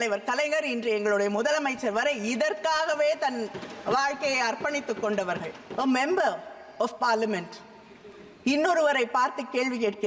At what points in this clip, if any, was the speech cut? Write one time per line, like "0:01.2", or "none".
0:05.6